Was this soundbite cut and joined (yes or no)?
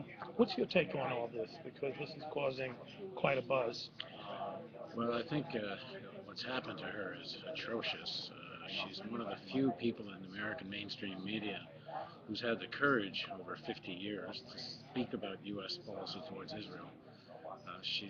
no